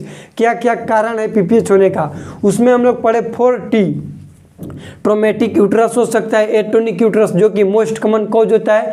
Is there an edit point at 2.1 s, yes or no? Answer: no